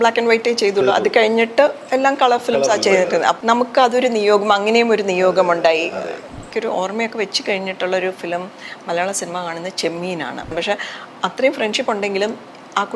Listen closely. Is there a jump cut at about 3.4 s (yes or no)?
yes